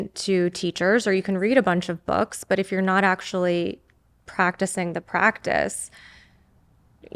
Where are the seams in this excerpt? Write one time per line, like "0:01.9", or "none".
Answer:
none